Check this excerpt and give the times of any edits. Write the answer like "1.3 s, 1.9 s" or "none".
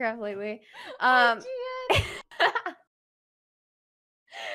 none